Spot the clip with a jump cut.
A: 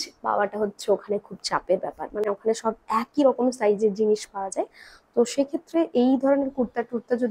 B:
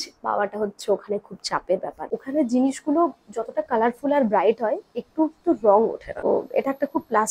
B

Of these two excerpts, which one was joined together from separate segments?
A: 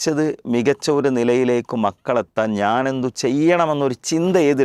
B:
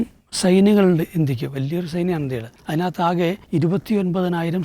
B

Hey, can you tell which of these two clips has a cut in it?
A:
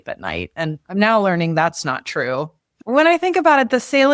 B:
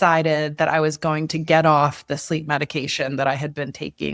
A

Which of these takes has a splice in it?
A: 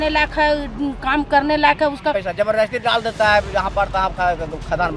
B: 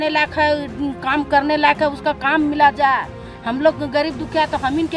A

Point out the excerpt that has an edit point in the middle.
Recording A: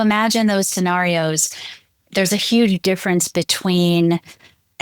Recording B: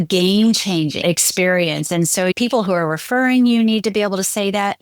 B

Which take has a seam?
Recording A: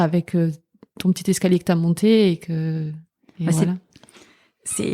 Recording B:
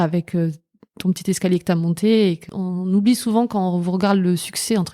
B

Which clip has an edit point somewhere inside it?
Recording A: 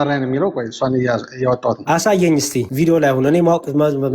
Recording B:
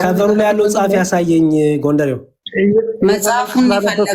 A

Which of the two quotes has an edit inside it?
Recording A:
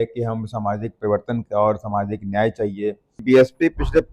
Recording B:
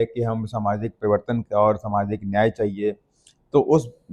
A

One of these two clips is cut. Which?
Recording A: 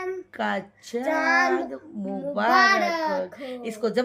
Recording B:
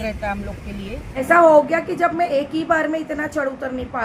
B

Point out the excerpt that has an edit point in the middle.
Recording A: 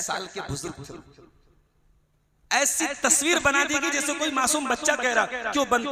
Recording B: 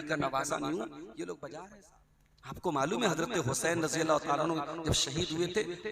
B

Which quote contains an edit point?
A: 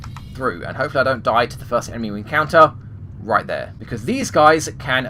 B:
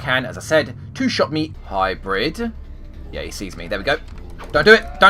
B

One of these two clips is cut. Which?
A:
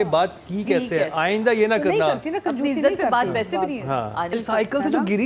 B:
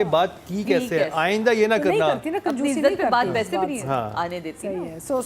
A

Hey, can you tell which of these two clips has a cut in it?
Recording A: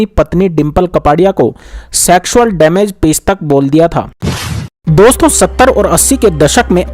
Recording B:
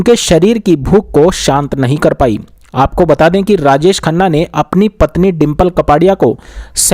A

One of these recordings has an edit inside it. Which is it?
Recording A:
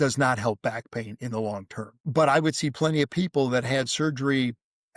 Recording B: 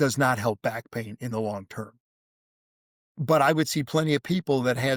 A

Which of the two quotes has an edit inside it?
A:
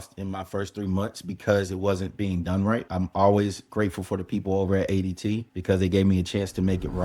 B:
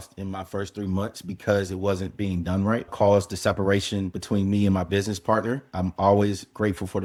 A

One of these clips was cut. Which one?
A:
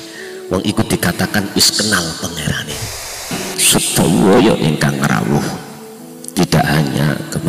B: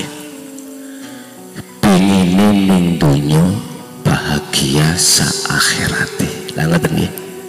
A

